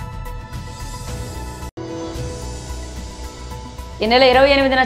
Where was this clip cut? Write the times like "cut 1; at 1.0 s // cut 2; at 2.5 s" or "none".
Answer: cut 1; at 3.6 s

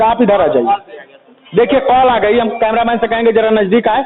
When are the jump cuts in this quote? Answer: none

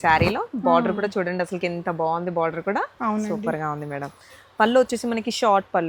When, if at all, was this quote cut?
none

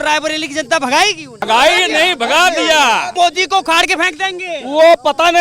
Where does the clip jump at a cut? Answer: cut 1; at 1.4 s // cut 2; at 3.1 s

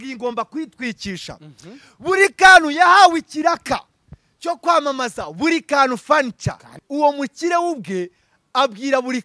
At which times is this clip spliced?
cut 1; at 6.8 s

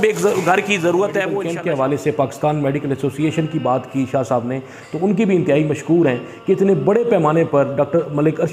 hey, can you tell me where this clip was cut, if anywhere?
cut 1; at 1.4 s

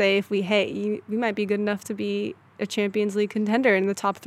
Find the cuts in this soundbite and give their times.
none

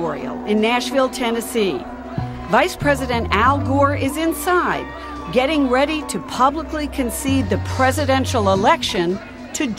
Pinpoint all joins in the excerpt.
cut 1; at 7.7 s

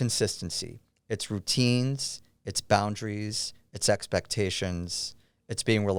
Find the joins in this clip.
none

